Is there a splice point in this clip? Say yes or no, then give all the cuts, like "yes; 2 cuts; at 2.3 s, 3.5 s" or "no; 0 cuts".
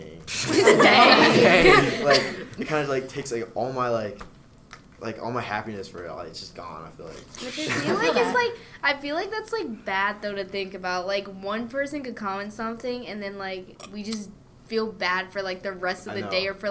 yes; 1 cut; at 7.3 s